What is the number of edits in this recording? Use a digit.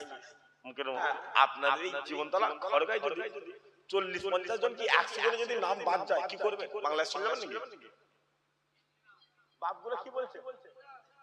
1